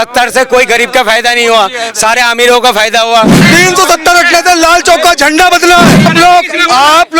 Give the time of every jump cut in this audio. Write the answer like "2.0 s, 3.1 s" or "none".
3.4 s, 6.0 s

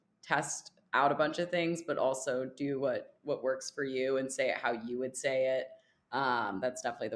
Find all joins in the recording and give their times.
none

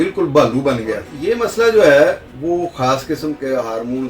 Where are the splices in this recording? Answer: 1.1 s

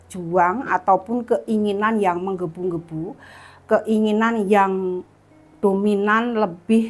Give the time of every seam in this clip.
none

